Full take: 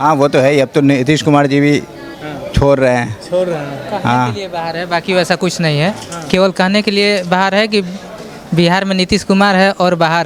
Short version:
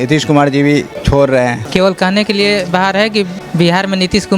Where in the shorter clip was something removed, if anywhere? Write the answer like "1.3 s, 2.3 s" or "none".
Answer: 1.0 s, 1.6 s, 3.4 s